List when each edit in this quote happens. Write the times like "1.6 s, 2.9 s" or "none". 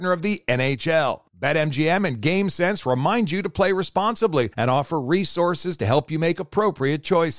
none